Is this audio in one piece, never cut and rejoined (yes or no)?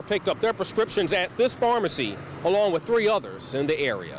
yes